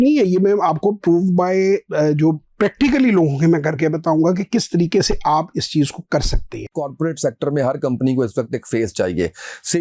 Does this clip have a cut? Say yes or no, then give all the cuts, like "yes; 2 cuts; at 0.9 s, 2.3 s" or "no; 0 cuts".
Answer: yes; 1 cut; at 6.7 s